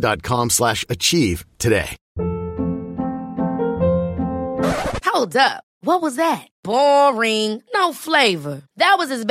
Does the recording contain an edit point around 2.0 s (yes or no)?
yes